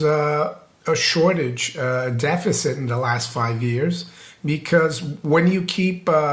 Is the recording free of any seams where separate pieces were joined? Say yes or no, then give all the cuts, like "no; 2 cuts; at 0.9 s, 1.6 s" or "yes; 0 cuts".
yes; 0 cuts